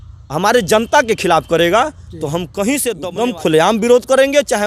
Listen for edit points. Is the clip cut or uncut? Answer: cut